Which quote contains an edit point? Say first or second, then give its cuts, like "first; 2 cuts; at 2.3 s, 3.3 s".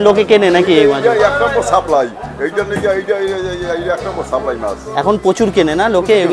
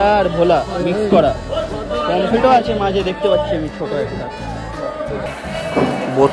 second; 1 cut; at 5.3 s